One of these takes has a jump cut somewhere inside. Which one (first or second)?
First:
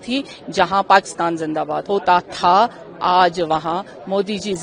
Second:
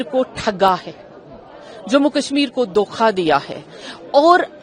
first